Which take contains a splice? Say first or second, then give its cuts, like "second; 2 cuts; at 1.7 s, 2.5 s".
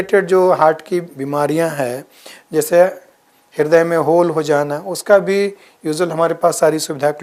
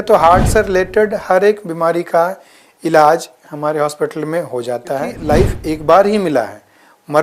second; 1 cut; at 5.1 s